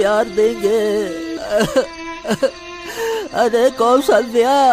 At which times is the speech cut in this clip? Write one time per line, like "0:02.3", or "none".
0:01.4